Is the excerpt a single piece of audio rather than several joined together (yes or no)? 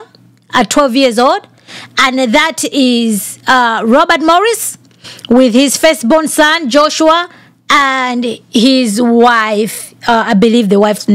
yes